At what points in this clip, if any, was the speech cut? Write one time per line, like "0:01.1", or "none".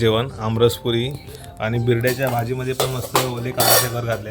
none